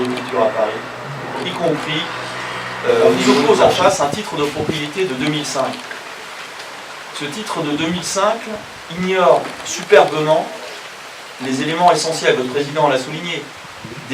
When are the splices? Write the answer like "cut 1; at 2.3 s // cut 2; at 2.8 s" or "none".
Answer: cut 1; at 3.4 s